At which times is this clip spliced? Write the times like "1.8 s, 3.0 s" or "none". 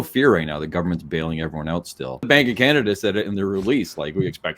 2.3 s